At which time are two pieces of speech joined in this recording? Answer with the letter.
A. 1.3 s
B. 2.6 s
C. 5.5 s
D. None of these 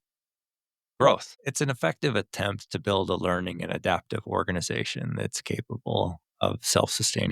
A